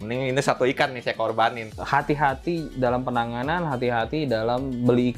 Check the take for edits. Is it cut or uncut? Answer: cut